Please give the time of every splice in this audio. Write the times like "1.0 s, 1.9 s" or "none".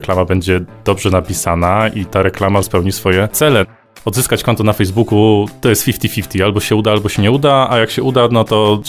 3.8 s, 5.5 s